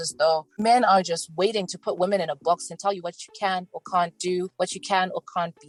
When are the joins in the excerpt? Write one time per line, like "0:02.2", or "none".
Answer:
none

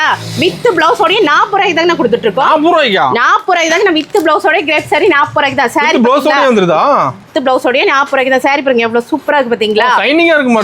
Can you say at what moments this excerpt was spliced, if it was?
none

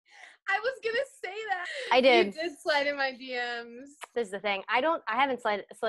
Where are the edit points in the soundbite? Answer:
0:01.6
0:04.1

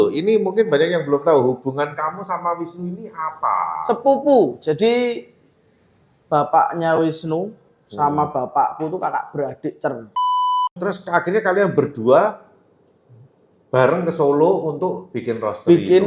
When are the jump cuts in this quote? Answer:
0:10.6

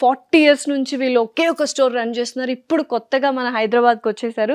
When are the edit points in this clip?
none

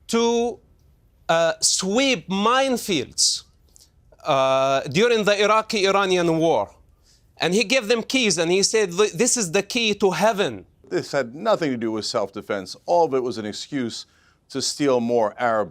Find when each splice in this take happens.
0:10.8

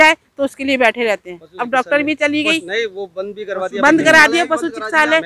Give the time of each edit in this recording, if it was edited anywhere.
none

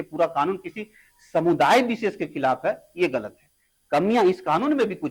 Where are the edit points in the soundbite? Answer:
none

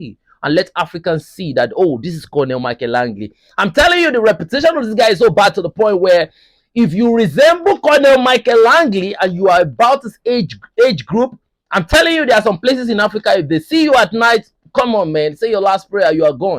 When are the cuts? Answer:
none

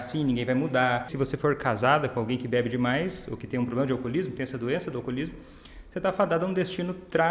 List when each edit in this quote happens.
0:01.1

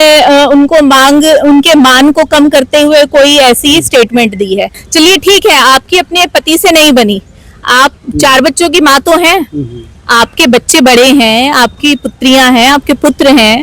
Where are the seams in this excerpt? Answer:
0:04.8
0:08.0

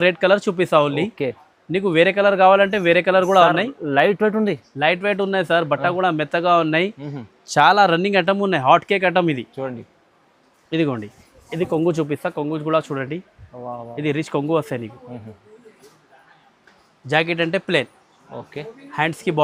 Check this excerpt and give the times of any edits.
none

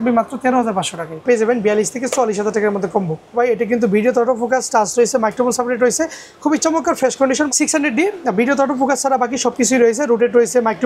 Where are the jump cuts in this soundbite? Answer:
0:01.2
0:03.4
0:07.5

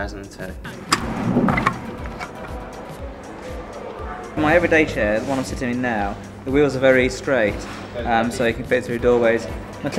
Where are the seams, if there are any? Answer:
0:02.3

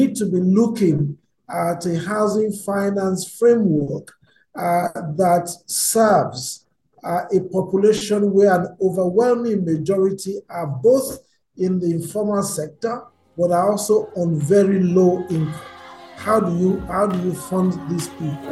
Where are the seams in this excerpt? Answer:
none

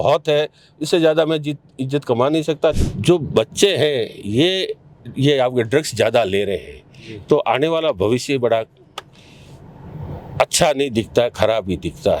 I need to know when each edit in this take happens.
0:02.8

